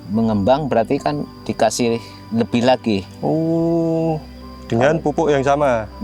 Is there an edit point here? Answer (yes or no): no